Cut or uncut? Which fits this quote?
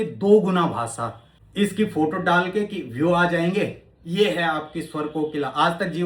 cut